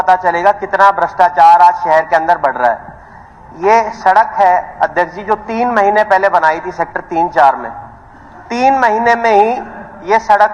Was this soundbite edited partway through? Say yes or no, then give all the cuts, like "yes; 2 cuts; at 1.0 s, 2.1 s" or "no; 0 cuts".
no; 0 cuts